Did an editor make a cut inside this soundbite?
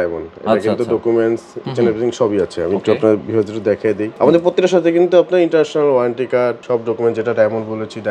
yes; 2 cuts; at 4.1 s, 6.6 s

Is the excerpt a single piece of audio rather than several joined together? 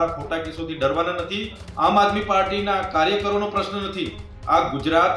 no; 1 cut; at 1.6 s

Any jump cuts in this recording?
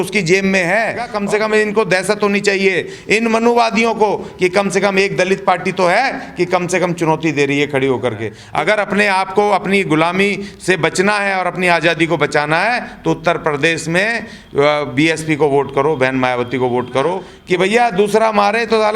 yes; 3 cuts; at 1.1 s, 8.3 s, 17.3 s

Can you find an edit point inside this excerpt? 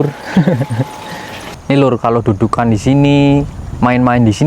yes; 1 cut; at 1.4 s

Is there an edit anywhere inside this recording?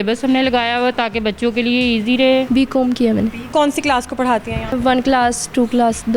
yes; 3 cuts; at 2.5 s, 3.4 s, 4.8 s

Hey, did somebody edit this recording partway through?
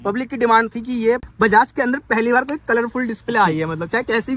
no; 0 cuts

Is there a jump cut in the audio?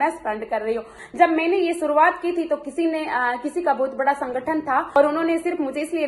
yes; 2 cuts; at 1.0 s, 5.0 s

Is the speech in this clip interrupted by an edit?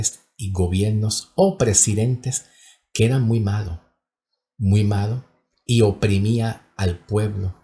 no; 0 cuts

